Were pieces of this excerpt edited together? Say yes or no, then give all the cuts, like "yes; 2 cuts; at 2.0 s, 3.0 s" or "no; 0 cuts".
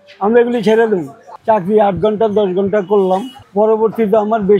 yes; 1 cut; at 1.2 s